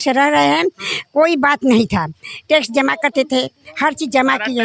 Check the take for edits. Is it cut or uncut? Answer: uncut